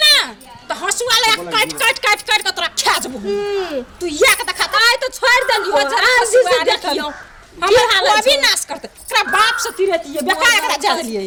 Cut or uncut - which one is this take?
uncut